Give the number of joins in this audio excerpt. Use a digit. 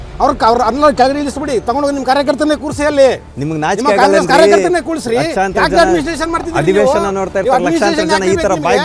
0